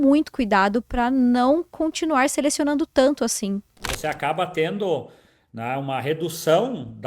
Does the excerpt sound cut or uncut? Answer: cut